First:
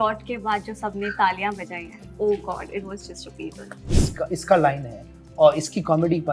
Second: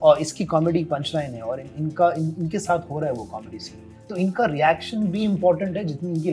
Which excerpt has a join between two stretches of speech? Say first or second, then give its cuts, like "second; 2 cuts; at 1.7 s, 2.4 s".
first; 1 cut; at 3.9 s